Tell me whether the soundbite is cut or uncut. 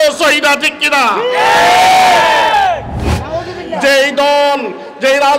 cut